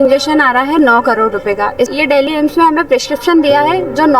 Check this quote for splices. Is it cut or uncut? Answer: cut